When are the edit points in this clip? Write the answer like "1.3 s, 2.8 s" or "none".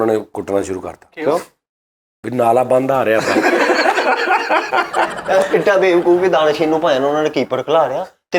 5.2 s